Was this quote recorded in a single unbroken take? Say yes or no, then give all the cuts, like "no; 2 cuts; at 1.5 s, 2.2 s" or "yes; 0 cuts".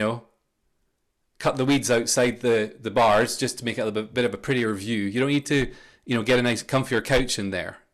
yes; 0 cuts